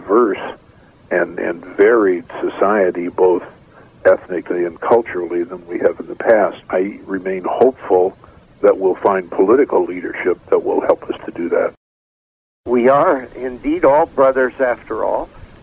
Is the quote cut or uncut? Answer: cut